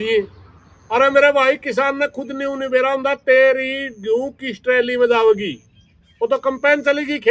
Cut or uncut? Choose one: uncut